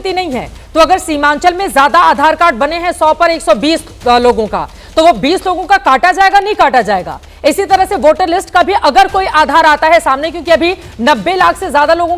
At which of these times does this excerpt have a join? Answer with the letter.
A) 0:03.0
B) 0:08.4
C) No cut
C